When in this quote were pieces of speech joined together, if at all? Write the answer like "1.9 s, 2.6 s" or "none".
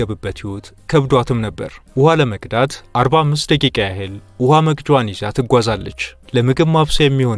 1.7 s